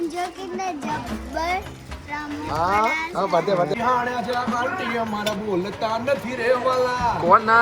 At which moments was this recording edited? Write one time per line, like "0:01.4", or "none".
0:03.7